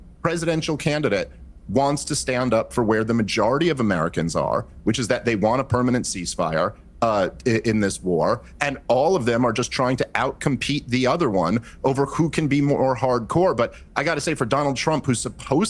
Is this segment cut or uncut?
cut